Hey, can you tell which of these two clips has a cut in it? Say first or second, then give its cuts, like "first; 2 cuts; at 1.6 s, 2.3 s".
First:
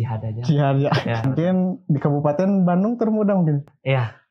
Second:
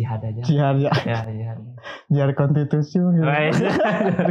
first; 1 cut; at 1.2 s